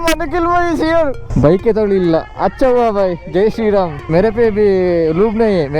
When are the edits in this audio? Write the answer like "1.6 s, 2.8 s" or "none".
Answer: 1.2 s, 4.0 s